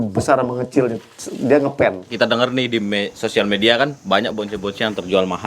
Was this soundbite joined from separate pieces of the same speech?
yes; 1 cut; at 2.1 s

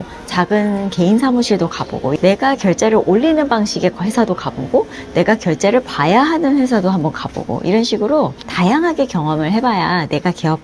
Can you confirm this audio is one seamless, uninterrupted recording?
no; 1 cut; at 2.2 s

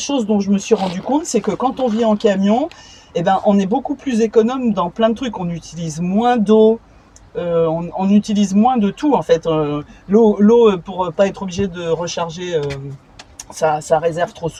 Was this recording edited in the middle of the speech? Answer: no; 0 cuts

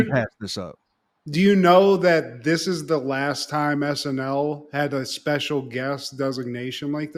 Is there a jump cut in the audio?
no; 0 cuts

